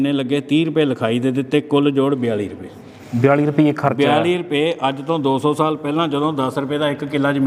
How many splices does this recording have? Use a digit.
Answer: 0